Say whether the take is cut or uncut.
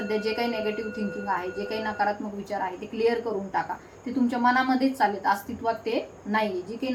uncut